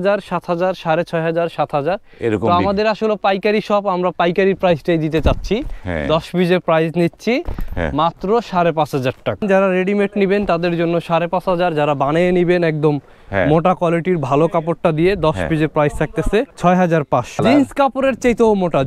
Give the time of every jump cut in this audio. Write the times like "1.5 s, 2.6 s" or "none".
9.4 s, 16.5 s, 17.4 s